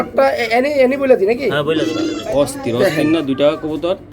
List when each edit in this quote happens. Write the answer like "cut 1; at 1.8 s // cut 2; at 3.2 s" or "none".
cut 1; at 2.0 s